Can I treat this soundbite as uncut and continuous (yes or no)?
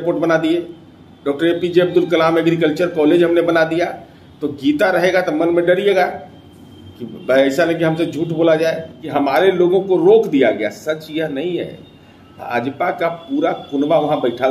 no